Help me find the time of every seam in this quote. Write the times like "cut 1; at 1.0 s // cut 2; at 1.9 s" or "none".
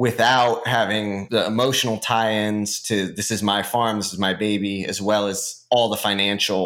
cut 1; at 1.2 s